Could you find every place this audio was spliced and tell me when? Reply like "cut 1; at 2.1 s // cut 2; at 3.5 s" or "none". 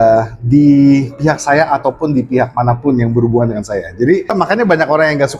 cut 1; at 4.3 s